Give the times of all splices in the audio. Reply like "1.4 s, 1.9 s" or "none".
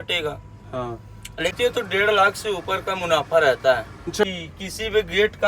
1.6 s, 4.2 s